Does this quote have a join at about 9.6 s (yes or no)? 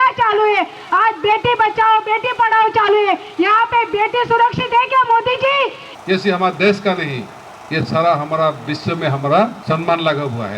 yes